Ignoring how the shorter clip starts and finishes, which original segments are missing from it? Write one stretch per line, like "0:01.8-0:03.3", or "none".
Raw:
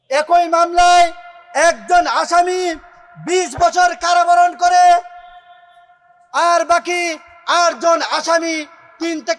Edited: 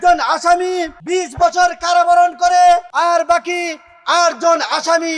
0:02.8-0:03.2
0:05.1-0:06.3